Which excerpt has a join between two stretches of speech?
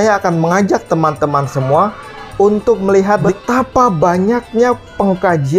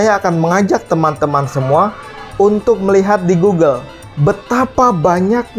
first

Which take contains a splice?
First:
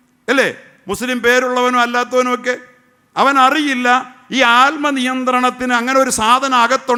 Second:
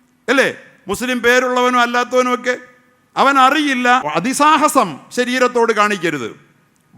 second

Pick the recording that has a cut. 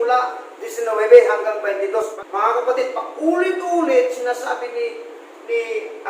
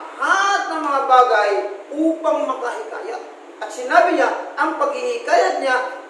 first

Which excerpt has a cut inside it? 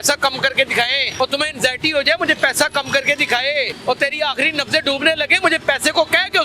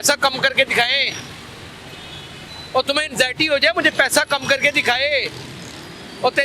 first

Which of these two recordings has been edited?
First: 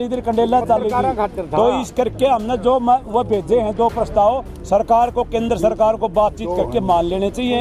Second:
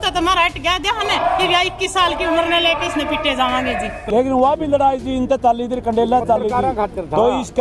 second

